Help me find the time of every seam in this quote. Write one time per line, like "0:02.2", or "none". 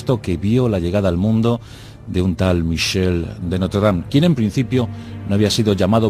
0:01.1